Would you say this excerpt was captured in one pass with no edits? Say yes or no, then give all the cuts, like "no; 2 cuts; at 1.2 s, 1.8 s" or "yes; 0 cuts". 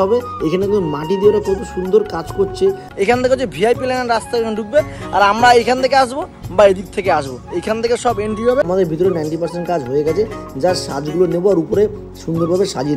no; 2 cuts; at 2.8 s, 8.7 s